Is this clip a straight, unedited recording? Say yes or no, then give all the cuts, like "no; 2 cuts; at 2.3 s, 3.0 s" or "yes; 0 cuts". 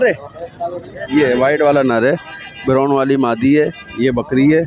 yes; 0 cuts